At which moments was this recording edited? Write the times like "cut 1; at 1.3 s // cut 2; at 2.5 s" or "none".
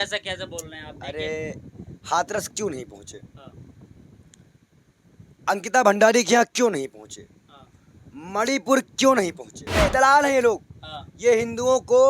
cut 1; at 9.8 s